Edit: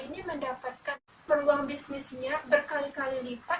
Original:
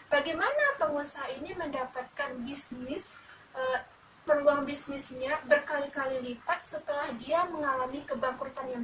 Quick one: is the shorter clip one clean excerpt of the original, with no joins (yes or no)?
no